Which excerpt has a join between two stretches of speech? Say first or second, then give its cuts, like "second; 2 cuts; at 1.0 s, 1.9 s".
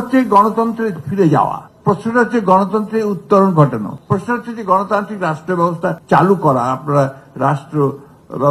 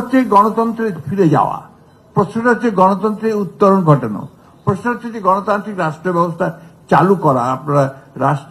first; 3 cuts; at 1.7 s, 3.9 s, 6.0 s